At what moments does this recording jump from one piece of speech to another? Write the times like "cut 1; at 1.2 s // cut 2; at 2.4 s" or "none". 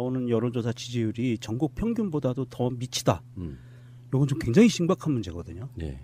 none